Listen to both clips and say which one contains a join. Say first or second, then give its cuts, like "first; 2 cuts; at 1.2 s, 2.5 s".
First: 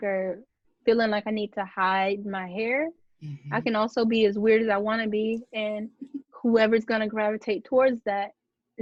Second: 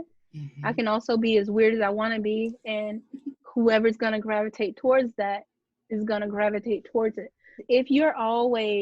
second; 1 cut; at 7.6 s